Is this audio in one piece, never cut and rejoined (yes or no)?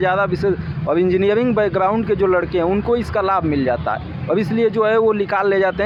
yes